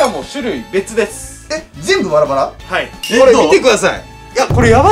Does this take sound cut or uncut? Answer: cut